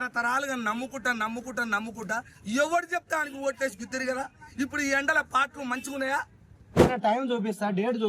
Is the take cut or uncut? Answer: cut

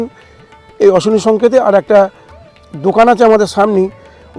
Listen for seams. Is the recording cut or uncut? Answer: uncut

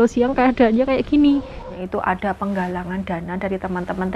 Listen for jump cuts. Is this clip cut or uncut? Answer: cut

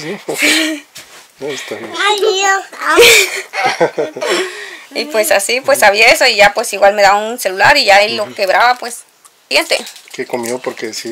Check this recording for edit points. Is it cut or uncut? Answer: cut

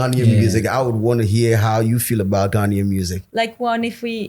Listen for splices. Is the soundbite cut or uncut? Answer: cut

